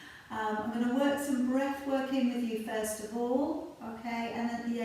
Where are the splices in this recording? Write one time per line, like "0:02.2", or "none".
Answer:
none